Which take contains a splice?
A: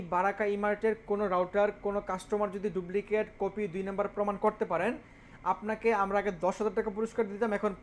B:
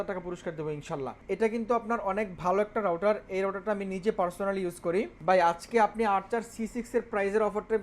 B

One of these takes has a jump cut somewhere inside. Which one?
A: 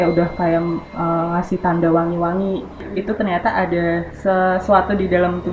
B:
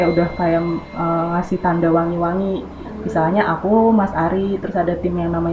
A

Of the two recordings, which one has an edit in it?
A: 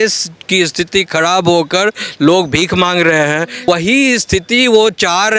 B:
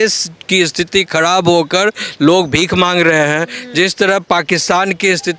A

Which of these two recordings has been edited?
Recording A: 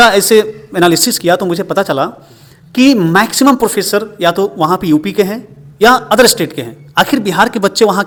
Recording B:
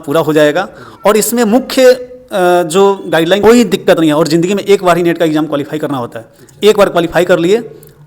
B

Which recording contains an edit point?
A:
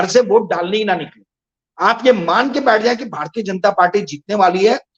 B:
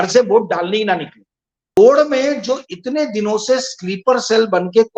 B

